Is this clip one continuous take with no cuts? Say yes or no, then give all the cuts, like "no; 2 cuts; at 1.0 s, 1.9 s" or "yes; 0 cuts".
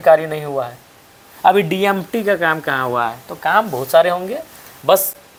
yes; 0 cuts